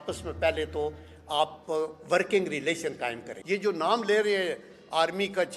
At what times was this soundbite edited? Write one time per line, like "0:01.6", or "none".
0:03.3